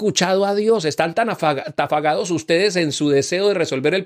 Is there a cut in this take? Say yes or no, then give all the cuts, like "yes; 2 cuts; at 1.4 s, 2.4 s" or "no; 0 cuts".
no; 0 cuts